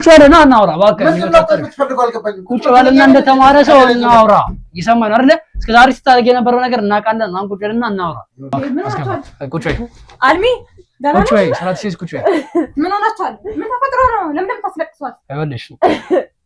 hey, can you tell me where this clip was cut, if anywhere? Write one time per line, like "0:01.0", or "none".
0:08.5